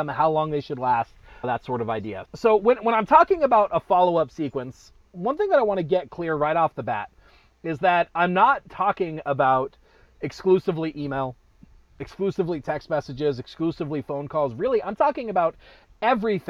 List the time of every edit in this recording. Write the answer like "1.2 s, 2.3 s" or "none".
none